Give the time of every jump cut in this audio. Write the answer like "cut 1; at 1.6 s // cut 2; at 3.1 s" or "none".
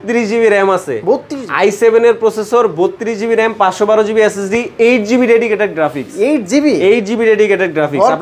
none

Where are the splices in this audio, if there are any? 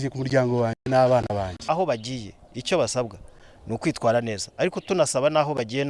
cut 1; at 1.6 s

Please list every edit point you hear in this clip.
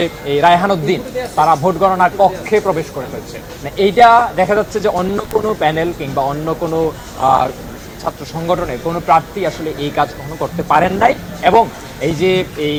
none

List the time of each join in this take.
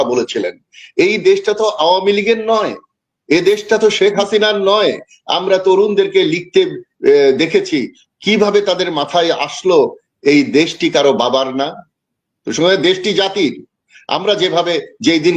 none

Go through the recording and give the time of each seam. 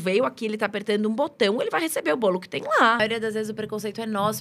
cut 1; at 3.0 s

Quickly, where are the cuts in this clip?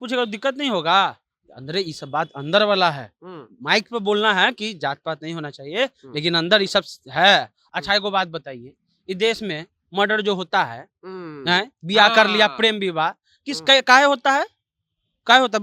none

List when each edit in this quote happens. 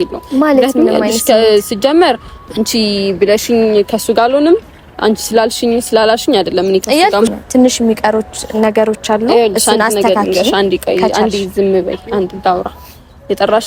none

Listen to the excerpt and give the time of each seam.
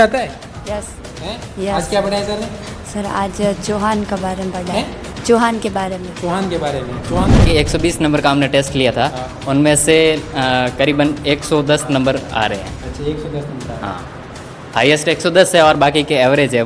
cut 1; at 7.4 s

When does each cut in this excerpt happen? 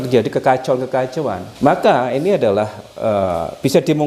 cut 1; at 1.4 s

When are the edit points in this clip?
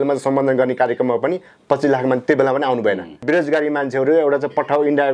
cut 1; at 3.2 s

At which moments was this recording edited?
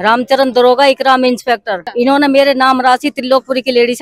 cut 1; at 1.8 s

